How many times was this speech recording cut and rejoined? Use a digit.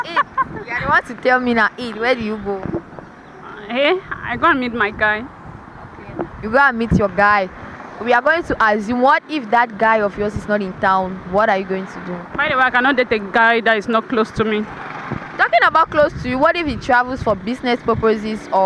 0